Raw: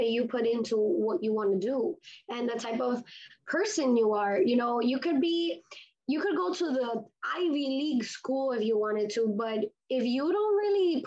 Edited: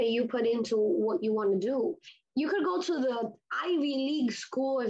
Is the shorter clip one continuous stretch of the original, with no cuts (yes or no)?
no